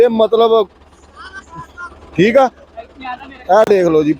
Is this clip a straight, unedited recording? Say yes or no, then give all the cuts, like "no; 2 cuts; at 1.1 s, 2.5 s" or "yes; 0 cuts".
yes; 0 cuts